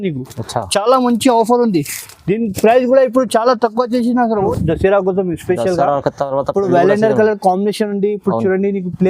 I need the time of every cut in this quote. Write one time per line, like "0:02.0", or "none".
0:04.5